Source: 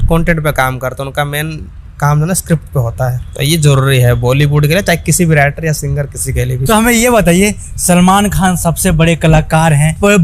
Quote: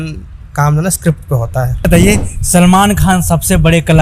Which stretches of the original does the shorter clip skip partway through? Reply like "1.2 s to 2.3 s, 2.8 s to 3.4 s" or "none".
3.3 s to 7.2 s